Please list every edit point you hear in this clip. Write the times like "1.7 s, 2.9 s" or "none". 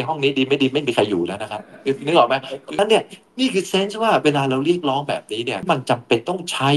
2.8 s, 5.6 s